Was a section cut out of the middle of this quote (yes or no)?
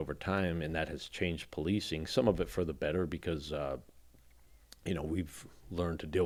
no